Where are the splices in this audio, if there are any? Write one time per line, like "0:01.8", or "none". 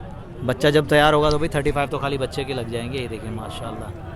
none